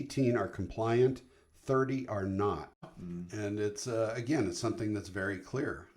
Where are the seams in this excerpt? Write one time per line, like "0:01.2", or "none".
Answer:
0:02.9